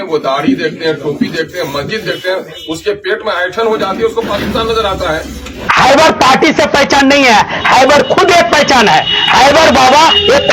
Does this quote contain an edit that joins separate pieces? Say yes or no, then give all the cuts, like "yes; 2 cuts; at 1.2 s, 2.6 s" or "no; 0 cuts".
yes; 1 cut; at 5.7 s